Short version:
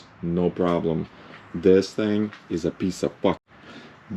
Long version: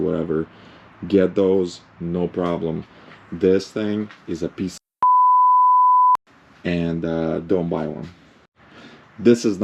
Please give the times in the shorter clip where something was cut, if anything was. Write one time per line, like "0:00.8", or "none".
0:03.1